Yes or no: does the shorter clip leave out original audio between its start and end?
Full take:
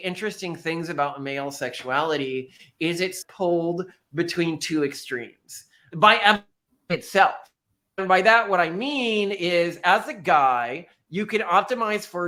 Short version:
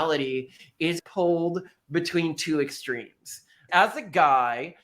yes